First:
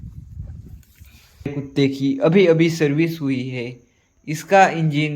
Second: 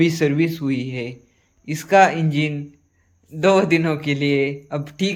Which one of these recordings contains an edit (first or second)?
first